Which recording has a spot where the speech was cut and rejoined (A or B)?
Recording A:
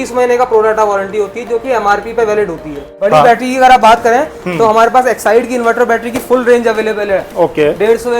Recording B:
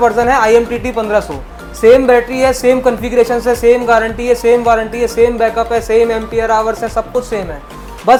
A